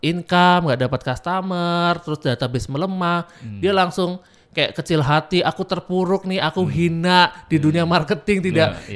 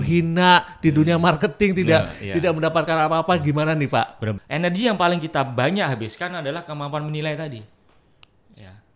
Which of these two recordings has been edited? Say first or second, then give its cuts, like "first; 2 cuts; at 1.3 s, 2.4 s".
second; 1 cut; at 4.3 s